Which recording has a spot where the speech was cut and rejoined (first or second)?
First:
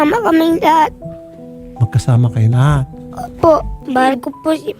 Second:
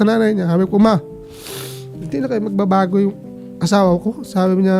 first